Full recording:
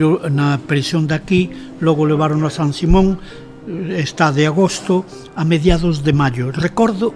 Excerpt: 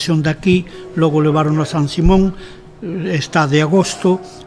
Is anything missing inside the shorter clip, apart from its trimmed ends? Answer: no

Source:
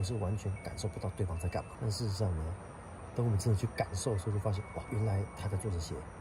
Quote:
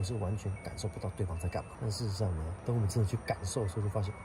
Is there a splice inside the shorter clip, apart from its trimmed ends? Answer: yes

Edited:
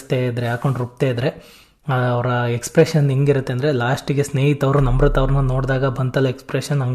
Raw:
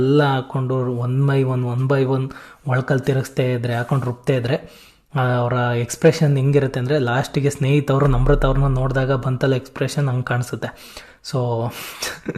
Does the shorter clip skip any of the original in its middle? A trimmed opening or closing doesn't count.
no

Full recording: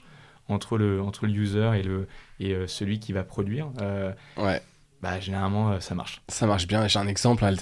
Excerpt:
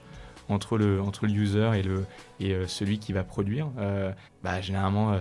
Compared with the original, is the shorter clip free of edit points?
no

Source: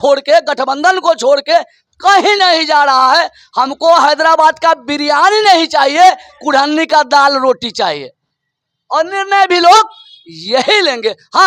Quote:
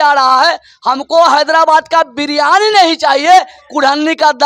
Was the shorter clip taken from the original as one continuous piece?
yes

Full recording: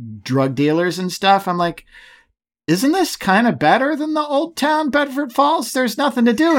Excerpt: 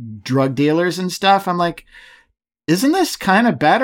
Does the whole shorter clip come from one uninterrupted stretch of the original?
yes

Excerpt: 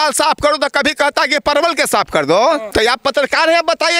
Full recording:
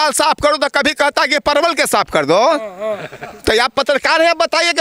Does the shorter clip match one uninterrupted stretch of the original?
no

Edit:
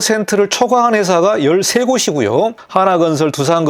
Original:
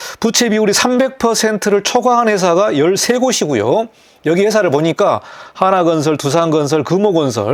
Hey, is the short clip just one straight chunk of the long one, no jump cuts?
no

